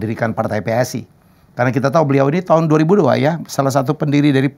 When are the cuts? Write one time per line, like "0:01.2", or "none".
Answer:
none